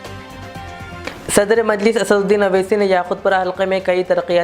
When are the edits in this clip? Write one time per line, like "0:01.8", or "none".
0:01.0